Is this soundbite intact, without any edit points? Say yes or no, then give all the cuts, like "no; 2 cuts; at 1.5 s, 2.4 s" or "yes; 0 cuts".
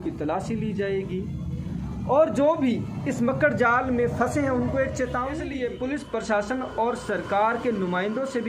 no; 1 cut; at 5.5 s